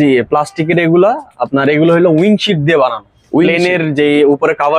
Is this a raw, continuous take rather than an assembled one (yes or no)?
yes